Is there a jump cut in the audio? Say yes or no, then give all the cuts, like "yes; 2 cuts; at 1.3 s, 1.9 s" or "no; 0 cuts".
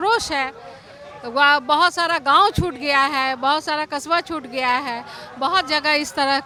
no; 0 cuts